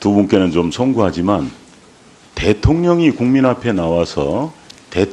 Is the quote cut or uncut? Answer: uncut